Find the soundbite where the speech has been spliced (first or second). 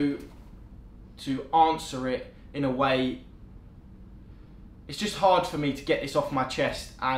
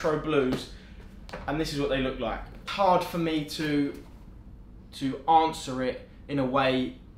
second